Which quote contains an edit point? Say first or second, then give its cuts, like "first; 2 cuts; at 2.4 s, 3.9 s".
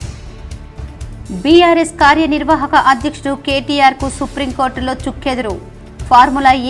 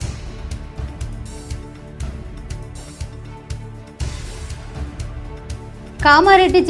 first; 1 cut; at 1.0 s